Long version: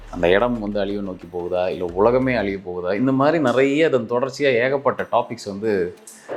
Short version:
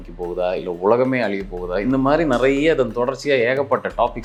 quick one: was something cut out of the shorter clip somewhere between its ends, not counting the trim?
no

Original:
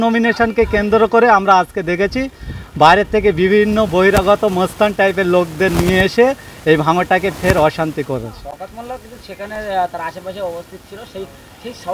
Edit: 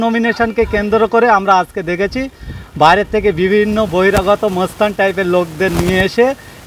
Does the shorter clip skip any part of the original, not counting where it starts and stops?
no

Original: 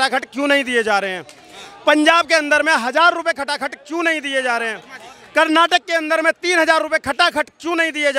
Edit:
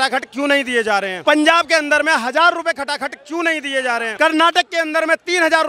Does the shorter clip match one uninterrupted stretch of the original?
no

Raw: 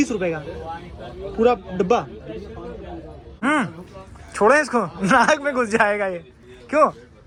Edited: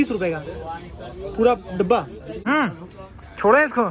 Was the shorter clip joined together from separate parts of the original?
yes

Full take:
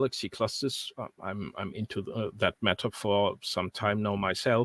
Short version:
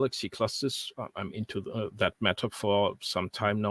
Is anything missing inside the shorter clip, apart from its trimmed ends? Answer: yes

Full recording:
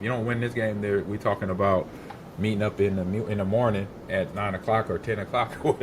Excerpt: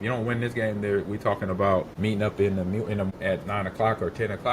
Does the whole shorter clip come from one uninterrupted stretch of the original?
no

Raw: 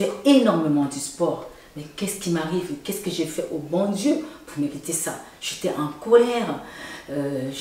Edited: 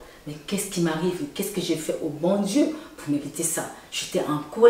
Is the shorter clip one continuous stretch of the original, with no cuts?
yes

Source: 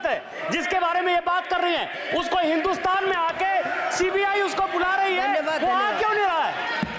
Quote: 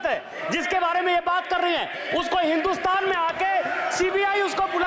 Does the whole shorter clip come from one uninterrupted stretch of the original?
yes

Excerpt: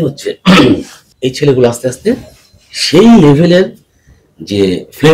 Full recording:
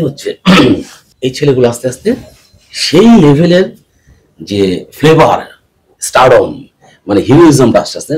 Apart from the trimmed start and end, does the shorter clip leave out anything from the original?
no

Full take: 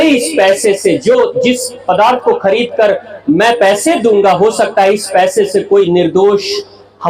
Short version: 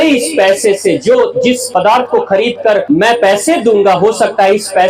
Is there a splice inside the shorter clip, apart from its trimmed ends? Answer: yes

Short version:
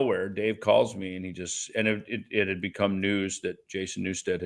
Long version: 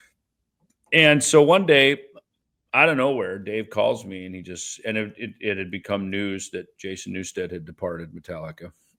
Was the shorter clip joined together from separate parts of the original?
no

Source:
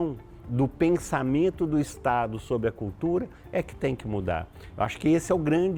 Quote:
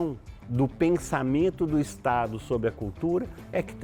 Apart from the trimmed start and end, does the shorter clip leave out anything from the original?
no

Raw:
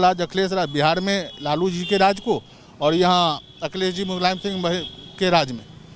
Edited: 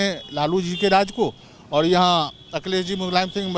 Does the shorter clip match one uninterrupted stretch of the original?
yes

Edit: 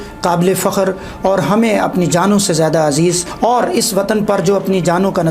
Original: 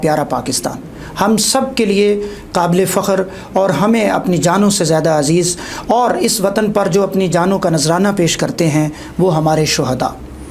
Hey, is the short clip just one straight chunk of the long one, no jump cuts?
no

